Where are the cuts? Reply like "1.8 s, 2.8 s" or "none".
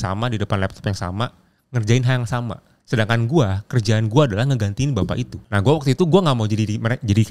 2.7 s, 5.4 s